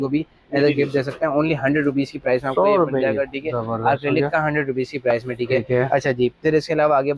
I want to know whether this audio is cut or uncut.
uncut